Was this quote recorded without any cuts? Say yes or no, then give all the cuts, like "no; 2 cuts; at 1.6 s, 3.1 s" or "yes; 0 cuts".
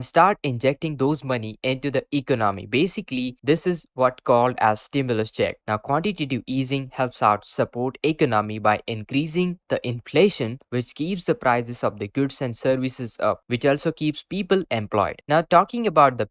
yes; 0 cuts